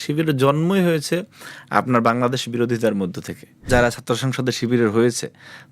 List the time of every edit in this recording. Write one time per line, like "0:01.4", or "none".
0:03.6